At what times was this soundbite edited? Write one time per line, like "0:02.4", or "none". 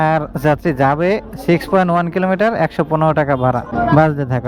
none